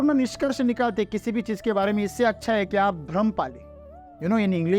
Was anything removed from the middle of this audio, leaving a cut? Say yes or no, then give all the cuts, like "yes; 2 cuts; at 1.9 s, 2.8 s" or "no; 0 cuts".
no; 0 cuts